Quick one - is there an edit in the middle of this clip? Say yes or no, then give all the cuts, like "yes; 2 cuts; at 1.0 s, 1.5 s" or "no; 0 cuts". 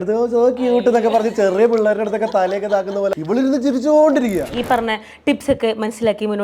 yes; 2 cuts; at 3.1 s, 4.5 s